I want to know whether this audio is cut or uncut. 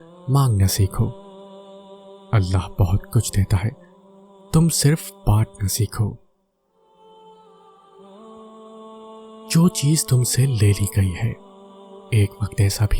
cut